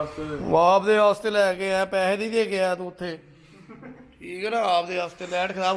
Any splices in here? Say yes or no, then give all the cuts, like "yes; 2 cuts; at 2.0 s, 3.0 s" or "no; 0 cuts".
no; 0 cuts